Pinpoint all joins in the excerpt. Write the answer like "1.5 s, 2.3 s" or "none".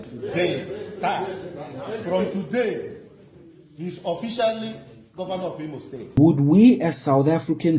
6.0 s

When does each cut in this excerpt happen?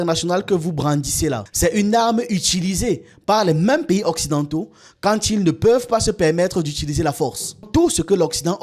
1.5 s, 7.7 s

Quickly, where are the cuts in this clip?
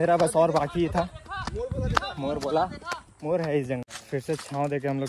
3.8 s

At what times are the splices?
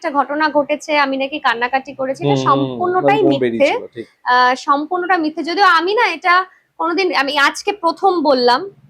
none

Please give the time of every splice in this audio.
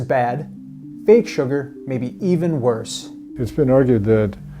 3.4 s

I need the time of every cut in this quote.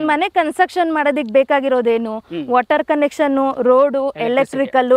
none

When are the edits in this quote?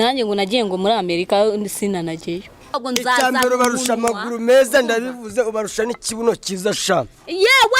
2.8 s

